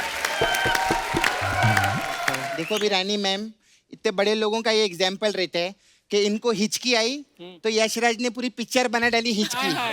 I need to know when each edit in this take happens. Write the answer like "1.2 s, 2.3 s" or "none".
2.5 s